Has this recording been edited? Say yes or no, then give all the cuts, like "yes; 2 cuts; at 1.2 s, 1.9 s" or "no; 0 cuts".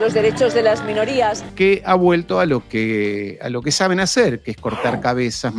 yes; 1 cut; at 1.6 s